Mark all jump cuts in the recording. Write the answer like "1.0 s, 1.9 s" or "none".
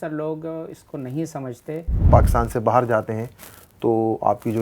2.0 s